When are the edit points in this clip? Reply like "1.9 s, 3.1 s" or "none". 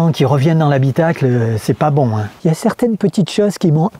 2.3 s